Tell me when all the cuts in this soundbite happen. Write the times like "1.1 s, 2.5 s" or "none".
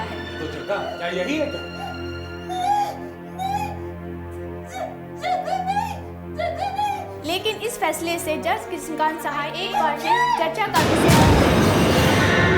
none